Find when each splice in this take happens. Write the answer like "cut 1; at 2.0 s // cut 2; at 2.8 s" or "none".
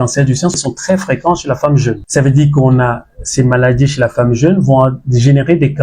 cut 1; at 2.0 s

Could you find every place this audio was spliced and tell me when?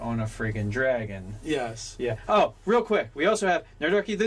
cut 1; at 1.6 s

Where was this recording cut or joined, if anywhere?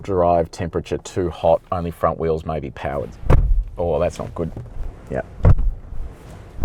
cut 1; at 3.1 s // cut 2; at 4.7 s

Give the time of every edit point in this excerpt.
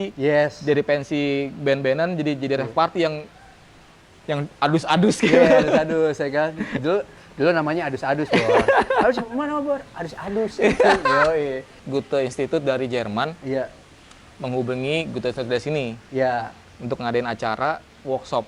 cut 1; at 11.8 s

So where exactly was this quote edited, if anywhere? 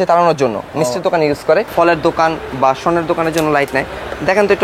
cut 1; at 1.7 s

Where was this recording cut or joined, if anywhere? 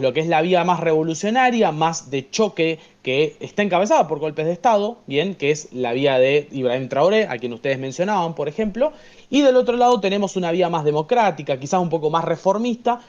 none

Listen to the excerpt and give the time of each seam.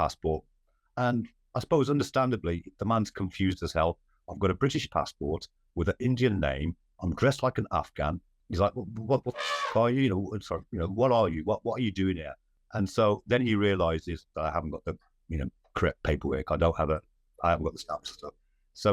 cut 1; at 12.5 s

